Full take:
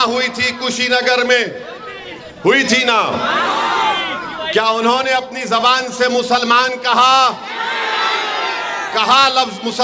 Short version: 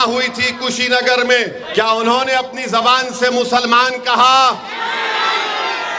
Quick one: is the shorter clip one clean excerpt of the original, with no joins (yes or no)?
no